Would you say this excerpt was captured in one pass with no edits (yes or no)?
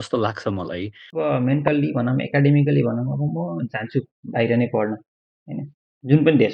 no